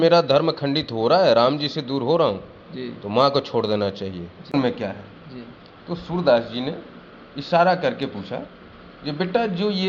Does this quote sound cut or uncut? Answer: cut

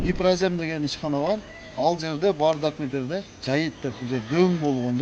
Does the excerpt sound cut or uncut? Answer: uncut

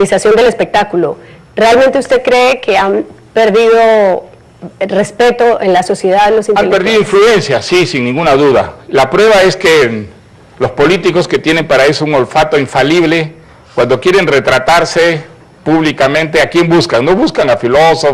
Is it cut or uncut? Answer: cut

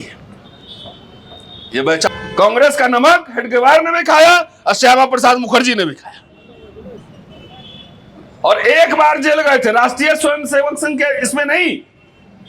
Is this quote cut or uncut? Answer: cut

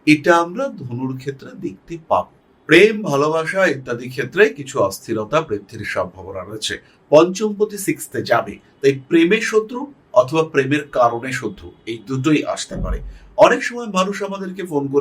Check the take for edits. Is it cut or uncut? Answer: cut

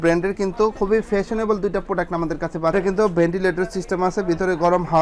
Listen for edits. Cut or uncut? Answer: cut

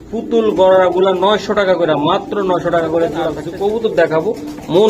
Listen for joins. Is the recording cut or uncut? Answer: cut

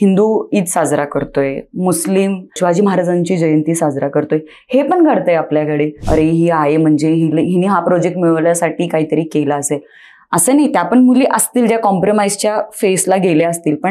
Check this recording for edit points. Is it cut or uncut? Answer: cut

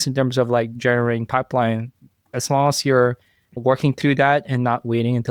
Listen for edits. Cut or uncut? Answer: cut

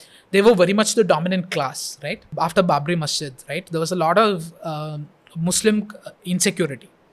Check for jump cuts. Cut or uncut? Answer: cut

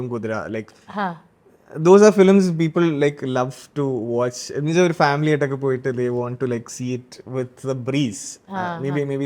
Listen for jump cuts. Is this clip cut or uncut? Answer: uncut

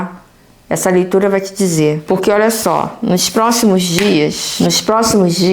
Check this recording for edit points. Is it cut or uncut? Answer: cut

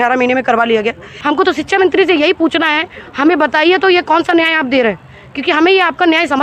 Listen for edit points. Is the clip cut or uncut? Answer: cut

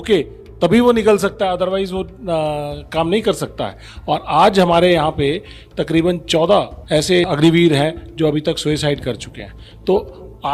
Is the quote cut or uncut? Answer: uncut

